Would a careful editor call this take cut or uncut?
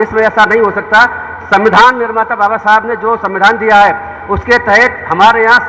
uncut